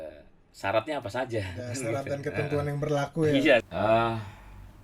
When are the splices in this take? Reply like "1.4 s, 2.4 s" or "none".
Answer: 3.6 s